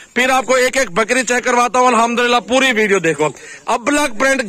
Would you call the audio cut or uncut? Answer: uncut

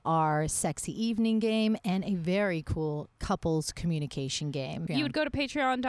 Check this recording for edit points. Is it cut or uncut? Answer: cut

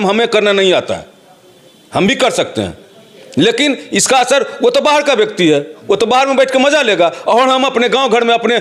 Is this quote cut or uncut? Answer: uncut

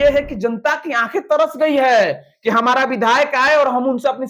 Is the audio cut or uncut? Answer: uncut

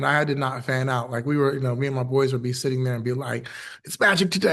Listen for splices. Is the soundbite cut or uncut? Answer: uncut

